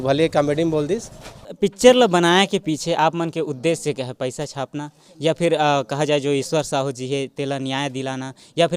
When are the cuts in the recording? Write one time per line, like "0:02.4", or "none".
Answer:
0:01.5